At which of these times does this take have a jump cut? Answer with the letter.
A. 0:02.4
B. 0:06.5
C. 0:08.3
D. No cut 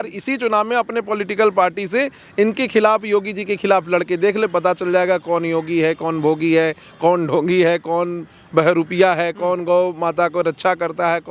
D